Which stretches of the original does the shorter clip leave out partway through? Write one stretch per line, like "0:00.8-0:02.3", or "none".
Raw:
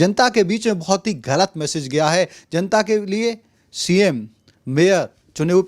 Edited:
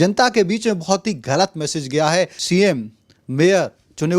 0:02.4-0:03.8

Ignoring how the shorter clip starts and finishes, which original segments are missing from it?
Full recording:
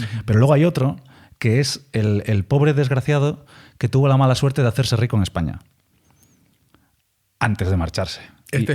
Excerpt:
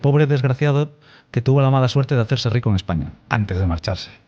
0:05.6-0:07.3

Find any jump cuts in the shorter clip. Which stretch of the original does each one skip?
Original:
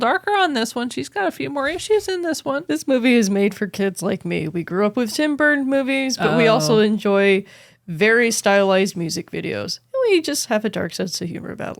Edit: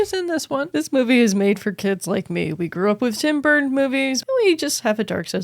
0:06.1-0:09.8

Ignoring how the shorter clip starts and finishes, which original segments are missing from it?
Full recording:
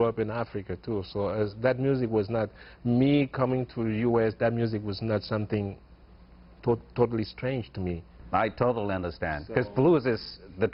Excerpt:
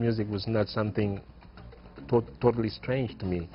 none

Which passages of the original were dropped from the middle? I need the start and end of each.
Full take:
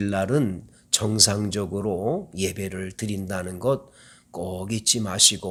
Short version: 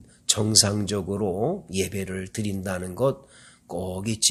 none

